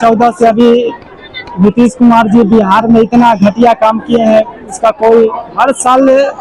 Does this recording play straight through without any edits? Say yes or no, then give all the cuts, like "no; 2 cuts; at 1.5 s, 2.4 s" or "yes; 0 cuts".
yes; 0 cuts